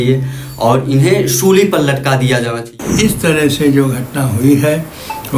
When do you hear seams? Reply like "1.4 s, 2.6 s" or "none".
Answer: 2.8 s